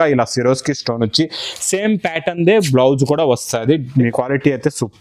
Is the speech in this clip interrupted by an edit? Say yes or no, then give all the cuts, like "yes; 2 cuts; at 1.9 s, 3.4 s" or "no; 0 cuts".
yes; 1 cut; at 4.1 s